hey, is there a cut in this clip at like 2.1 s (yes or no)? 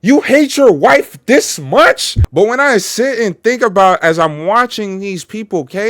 yes